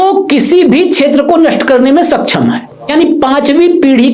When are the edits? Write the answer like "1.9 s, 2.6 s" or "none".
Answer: 2.9 s